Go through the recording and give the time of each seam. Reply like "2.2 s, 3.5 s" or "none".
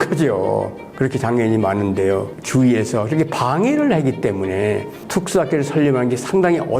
2.3 s

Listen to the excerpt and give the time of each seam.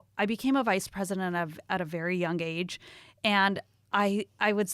none

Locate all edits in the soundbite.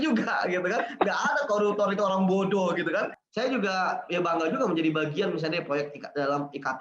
3.1 s

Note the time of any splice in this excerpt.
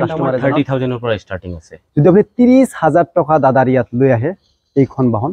none

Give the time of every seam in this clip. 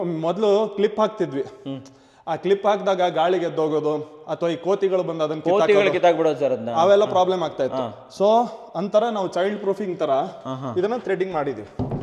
none

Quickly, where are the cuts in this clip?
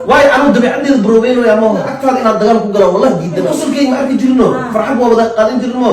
1.9 s, 3.5 s

